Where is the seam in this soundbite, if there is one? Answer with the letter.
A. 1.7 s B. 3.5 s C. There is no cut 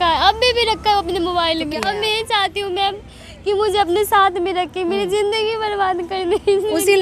A